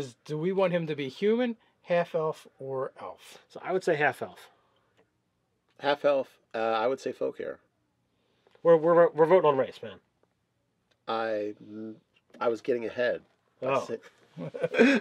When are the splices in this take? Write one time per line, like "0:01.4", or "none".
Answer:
0:05.3